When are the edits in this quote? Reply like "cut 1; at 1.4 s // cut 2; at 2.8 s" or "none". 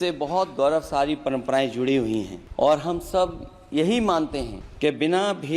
cut 1; at 2.4 s // cut 2; at 4.6 s

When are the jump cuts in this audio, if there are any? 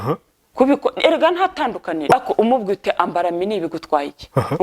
cut 1; at 2.1 s

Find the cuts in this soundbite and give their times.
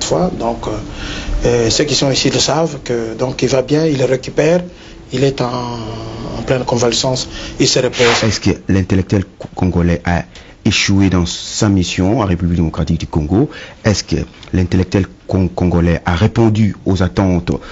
cut 1; at 8.2 s

